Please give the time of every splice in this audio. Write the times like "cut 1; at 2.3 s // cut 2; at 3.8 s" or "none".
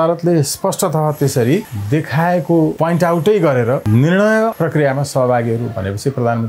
cut 1; at 1.8 s // cut 2; at 2.8 s // cut 3; at 3.8 s // cut 4; at 4.5 s